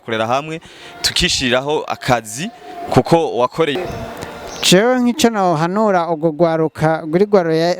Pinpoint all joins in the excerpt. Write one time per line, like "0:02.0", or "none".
0:03.7